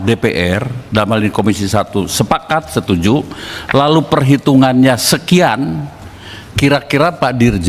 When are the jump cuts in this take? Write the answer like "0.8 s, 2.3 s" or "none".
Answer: none